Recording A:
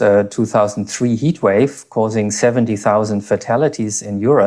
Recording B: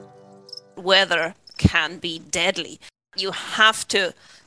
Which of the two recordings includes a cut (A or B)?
B